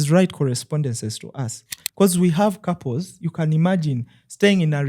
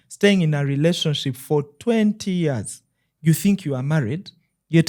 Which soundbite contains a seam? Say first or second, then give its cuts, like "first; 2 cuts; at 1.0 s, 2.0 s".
first; 1 cut; at 1.8 s